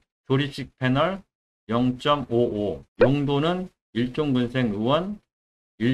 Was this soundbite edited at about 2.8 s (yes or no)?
yes